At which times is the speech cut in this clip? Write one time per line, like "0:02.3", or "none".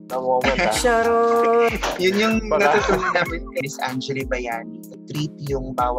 0:03.6
0:04.9